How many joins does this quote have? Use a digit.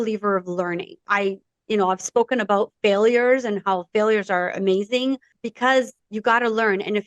3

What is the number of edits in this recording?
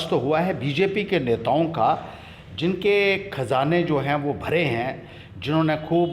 0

